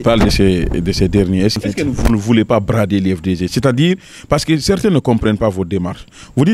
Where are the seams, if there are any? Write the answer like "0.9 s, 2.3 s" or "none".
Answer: 1.6 s